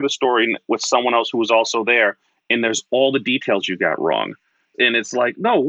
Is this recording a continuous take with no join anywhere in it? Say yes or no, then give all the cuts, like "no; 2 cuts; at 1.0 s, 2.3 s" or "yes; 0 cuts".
no; 1 cut; at 4.7 s